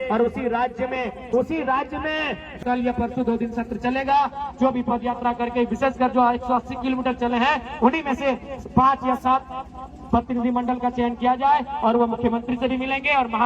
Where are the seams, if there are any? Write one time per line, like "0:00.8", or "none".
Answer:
0:02.6